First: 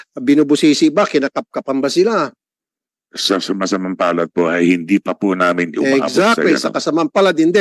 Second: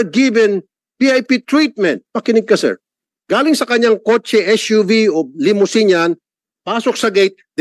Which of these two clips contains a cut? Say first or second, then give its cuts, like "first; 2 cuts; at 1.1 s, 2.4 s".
second; 1 cut; at 2.0 s